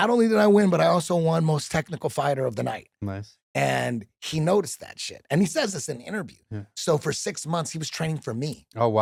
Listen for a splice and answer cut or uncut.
uncut